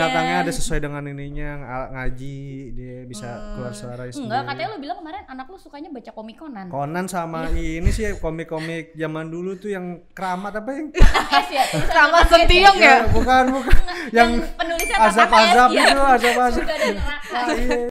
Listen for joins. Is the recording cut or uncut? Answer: uncut